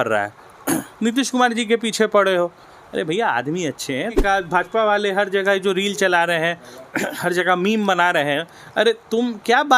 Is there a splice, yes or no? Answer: yes